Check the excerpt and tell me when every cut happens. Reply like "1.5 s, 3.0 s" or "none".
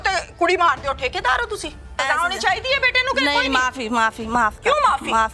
2.0 s